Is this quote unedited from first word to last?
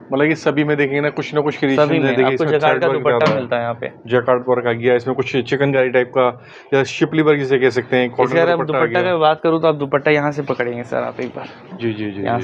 yes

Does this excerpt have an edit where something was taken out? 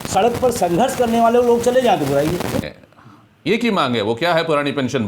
yes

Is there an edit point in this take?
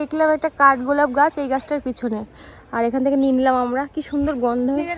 no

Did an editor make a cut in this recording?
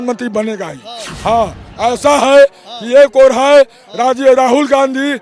yes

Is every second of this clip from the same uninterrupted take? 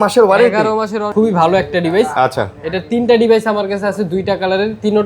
no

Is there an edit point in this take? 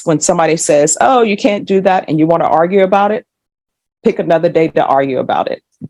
no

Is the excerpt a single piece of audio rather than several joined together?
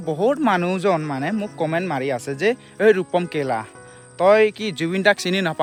yes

